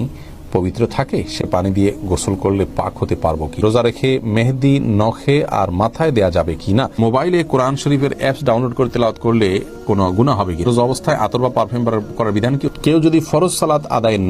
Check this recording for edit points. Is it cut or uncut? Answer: cut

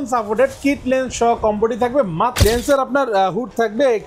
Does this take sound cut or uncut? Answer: cut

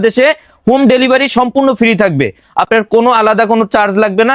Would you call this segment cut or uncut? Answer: uncut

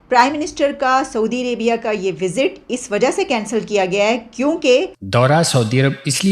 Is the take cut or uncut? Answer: cut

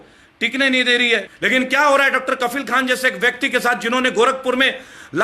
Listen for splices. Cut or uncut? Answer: cut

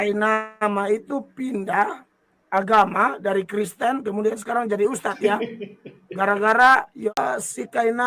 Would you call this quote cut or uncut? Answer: cut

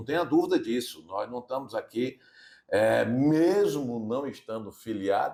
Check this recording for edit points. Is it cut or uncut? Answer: uncut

